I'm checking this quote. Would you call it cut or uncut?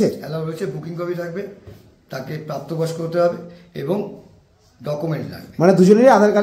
uncut